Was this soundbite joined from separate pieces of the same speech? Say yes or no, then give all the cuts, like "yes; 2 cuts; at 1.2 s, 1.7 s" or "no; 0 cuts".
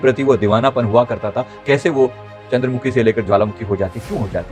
no; 0 cuts